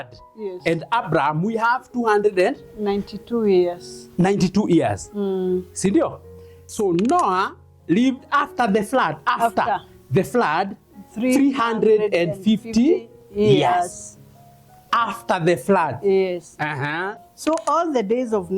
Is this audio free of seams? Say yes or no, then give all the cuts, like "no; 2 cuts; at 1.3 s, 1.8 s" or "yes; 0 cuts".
no; 2 cuts; at 6.6 s, 17.3 s